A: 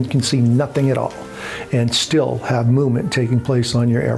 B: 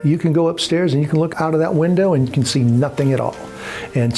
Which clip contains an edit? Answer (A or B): B